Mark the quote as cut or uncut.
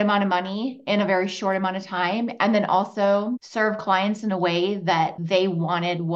cut